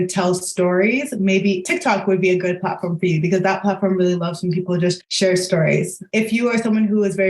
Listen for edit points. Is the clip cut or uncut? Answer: cut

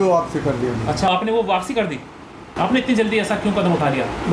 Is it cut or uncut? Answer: cut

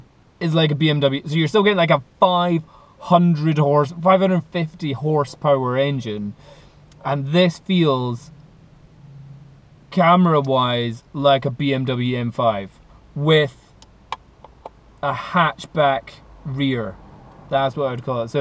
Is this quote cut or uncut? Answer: uncut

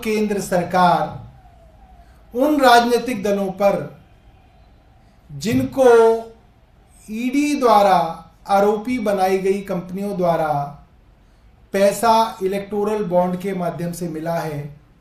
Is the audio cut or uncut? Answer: uncut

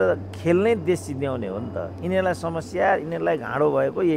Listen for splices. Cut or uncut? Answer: uncut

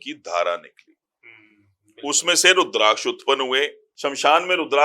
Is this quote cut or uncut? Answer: cut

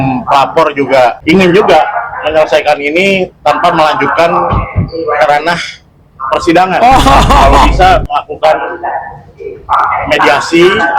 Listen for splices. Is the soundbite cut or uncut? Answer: cut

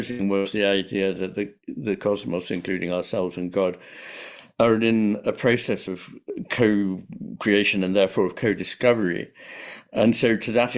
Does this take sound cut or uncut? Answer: uncut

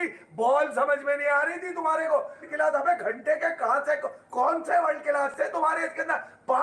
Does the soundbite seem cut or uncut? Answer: cut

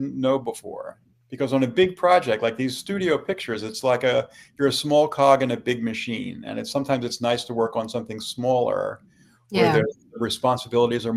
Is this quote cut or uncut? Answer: uncut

